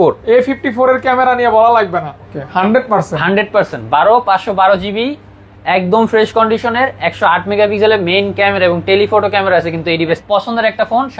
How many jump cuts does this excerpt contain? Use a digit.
2